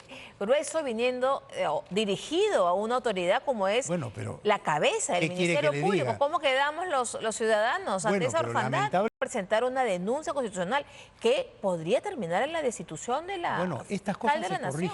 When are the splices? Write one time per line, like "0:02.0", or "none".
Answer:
0:09.1